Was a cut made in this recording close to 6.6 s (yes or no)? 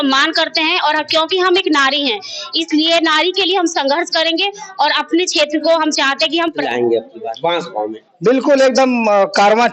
yes